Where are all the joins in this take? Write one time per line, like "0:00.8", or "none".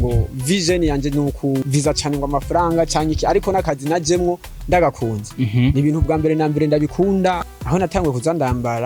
0:01.7
0:07.4